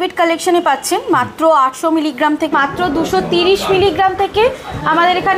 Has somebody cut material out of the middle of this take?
yes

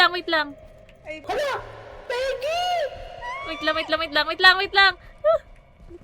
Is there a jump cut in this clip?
yes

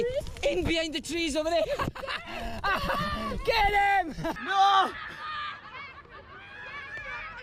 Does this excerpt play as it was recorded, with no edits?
yes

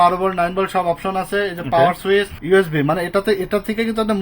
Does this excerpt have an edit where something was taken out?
yes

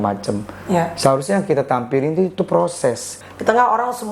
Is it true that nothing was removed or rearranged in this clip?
no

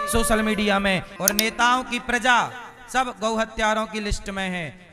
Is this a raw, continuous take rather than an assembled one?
no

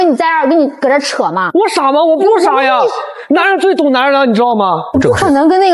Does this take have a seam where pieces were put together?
yes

